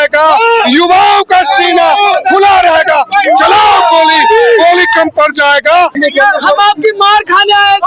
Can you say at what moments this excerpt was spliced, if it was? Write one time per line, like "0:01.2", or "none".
0:06.0